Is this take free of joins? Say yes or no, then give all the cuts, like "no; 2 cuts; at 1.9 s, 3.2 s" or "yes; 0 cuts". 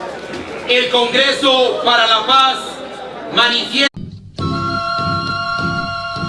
yes; 0 cuts